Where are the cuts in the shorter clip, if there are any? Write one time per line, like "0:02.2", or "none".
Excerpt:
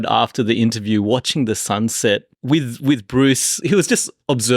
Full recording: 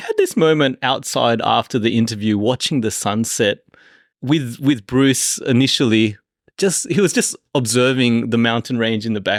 0:02.3
0:03.6